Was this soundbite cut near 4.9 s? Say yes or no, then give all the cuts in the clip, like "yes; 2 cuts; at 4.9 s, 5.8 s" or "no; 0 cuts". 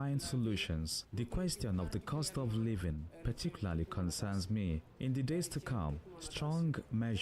yes; 1 cut; at 4.9 s